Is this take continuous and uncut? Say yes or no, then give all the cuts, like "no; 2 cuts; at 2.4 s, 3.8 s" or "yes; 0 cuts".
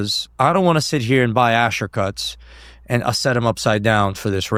yes; 0 cuts